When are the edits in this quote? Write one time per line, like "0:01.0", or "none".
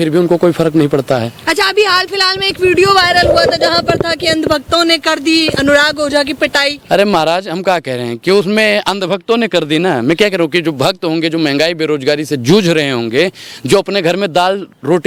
none